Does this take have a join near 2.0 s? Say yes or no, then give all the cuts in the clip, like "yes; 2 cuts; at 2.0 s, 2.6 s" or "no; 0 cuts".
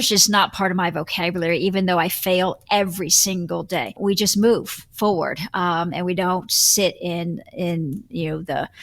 no; 1 cut; at 3.9 s